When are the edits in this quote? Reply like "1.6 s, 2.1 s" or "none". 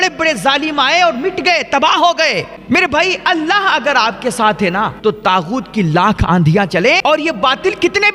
2.5 s, 4.9 s, 7.0 s